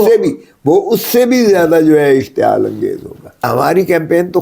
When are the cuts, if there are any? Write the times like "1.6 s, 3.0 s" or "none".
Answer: 3.5 s